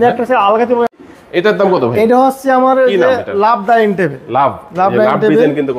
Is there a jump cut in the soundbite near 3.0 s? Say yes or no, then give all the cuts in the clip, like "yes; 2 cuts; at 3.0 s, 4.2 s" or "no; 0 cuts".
no; 1 cut; at 1.0 s